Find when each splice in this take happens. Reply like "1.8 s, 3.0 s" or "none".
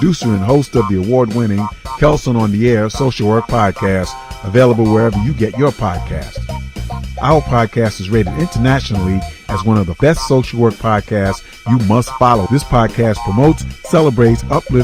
10.0 s